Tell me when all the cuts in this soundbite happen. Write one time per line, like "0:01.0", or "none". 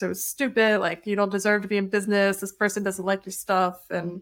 none